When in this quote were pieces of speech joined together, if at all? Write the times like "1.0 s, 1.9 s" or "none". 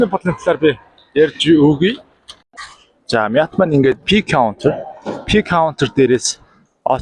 2.4 s